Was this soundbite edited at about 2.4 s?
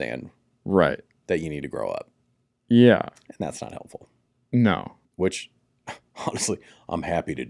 no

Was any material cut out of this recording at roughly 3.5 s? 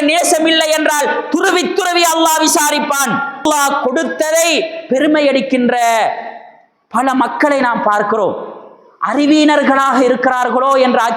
yes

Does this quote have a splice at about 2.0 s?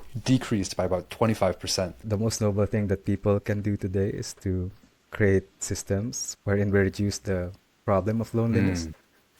yes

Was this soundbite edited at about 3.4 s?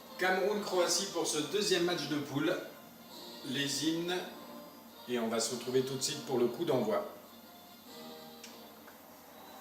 no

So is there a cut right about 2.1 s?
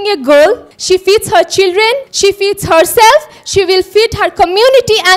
yes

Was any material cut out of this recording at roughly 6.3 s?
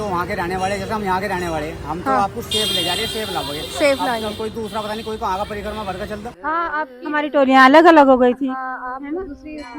yes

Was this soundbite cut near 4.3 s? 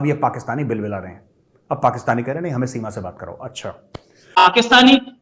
yes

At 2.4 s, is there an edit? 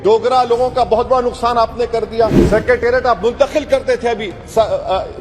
yes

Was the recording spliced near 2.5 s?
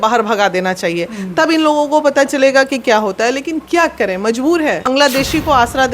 no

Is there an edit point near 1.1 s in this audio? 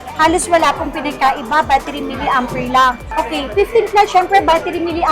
no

